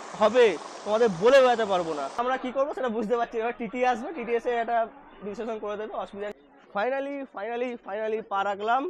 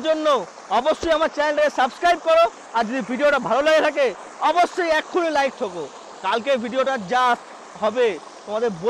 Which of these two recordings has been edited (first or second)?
first